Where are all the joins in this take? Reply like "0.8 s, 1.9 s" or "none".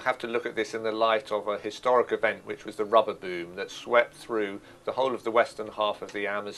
2.2 s